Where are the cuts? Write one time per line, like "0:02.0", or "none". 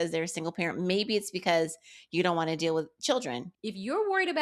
0:03.5